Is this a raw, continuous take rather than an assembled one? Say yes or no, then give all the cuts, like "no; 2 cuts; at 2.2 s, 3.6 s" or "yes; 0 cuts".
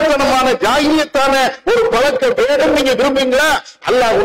yes; 0 cuts